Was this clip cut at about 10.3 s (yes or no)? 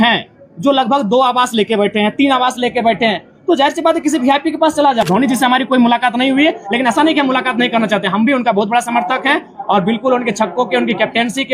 no